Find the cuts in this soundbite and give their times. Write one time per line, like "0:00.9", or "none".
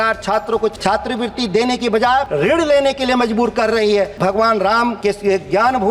0:00.8
0:02.3
0:04.1
0:05.0